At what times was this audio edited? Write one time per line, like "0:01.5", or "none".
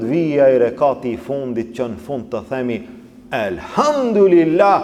none